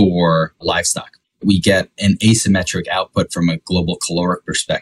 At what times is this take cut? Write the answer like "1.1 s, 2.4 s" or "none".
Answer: 0.8 s, 1.9 s